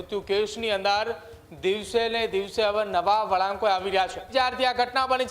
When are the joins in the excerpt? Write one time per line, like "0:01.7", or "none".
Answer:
0:04.2